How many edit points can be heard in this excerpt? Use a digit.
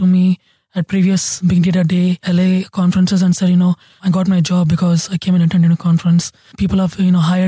4